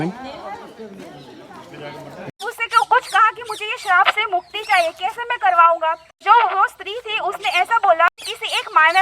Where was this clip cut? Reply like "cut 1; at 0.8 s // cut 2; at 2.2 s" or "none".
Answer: cut 1; at 2.4 s // cut 2; at 6.2 s // cut 3; at 8.1 s